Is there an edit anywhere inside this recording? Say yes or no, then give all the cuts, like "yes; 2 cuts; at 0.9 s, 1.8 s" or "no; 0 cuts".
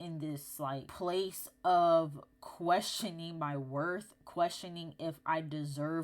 no; 0 cuts